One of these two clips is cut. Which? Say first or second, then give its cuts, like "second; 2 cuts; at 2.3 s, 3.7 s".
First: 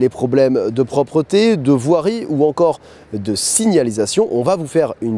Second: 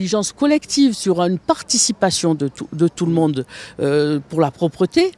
second; 1 cut; at 1.1 s